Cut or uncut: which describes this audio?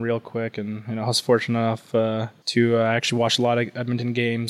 cut